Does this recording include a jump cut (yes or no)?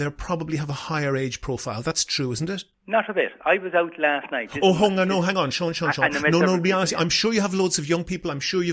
yes